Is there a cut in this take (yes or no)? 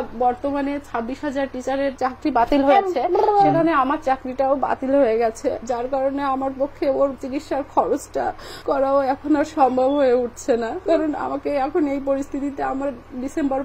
no